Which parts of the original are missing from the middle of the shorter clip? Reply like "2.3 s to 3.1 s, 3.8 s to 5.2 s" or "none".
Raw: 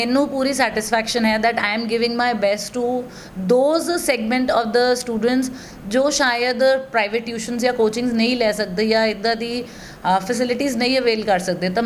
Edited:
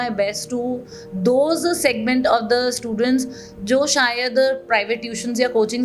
none